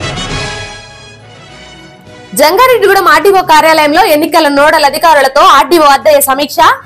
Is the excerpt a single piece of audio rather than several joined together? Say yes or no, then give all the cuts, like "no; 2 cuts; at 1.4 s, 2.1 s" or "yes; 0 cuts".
yes; 0 cuts